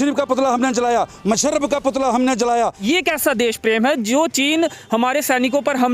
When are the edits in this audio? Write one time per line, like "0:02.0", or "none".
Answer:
0:02.8